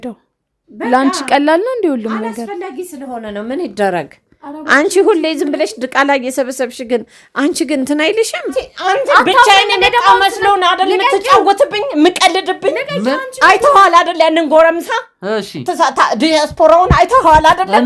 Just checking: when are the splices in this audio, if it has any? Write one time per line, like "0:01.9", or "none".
0:08.7